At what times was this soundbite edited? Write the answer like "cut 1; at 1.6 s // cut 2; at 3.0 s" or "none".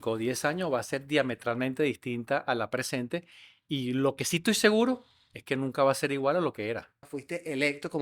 cut 1; at 7.1 s